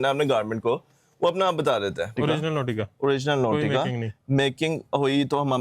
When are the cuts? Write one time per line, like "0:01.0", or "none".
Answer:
0:02.1